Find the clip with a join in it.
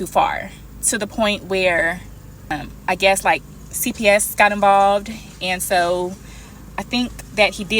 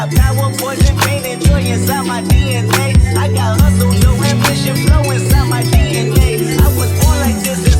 first; 1 cut; at 2.5 s

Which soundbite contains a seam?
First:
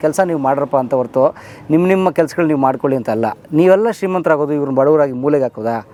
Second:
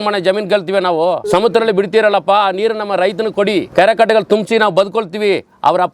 second; 2 cuts; at 1.2 s, 3.7 s

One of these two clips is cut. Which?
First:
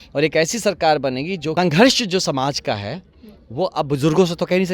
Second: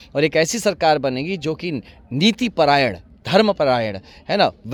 first; 1 cut; at 1.5 s

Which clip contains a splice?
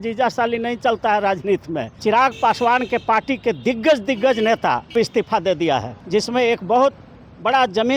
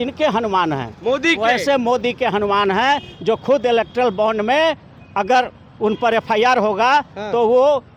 first; 3 cuts; at 1.9 s, 4.9 s, 6.0 s

